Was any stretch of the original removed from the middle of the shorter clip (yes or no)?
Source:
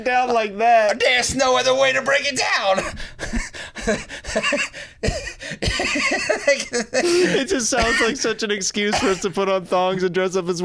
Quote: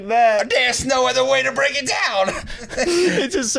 yes